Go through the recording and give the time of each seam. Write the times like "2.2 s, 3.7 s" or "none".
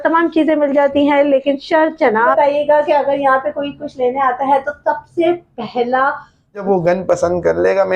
2.3 s, 6.6 s